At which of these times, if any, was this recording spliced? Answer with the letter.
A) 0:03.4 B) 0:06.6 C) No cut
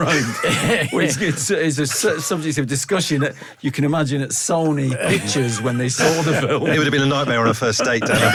C